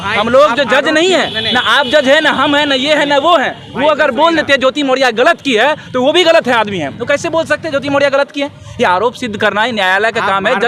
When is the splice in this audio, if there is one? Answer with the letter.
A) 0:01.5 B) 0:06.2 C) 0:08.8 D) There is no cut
D